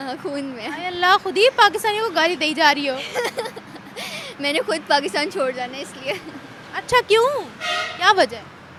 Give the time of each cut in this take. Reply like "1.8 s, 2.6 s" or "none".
none